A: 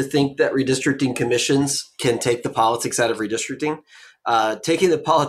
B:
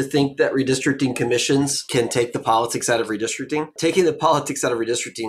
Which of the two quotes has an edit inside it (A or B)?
B